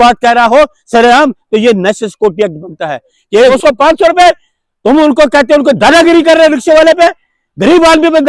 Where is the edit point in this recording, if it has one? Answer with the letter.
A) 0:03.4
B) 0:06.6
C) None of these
A